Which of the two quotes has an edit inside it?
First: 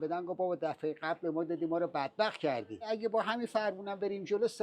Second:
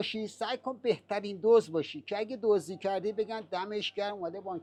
first; 1 cut; at 2.9 s

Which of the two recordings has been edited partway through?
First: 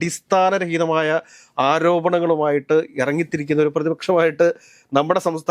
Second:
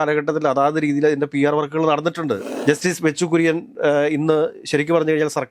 second; 1 cut; at 2.5 s

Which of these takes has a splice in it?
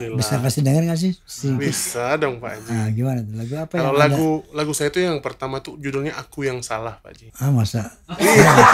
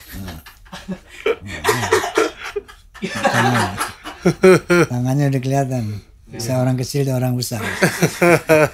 second; 1 cut; at 4.9 s

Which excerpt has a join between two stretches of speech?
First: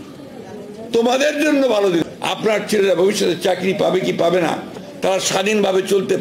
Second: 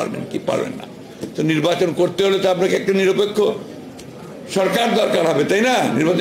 first; 1 cut; at 2.0 s

